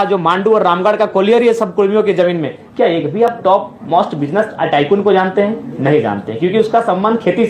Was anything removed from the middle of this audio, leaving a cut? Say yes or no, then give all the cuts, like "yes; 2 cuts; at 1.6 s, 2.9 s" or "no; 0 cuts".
no; 0 cuts